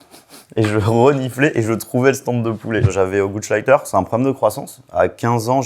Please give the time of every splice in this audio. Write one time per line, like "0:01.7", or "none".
0:02.9